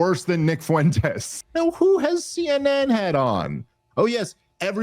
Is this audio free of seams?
no; 1 cut; at 1.3 s

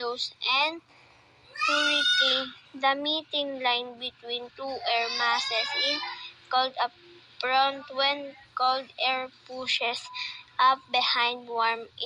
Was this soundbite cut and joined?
yes; 2 cuts; at 2.6 s, 7.8 s

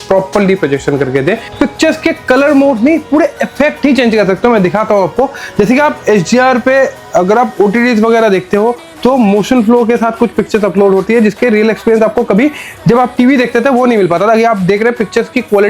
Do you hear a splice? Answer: yes; 1 cut; at 1.5 s

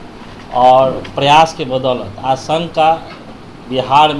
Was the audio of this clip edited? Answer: no; 0 cuts

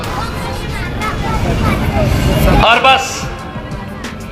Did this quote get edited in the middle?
no; 0 cuts

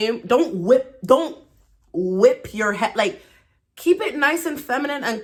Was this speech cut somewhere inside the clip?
no; 0 cuts

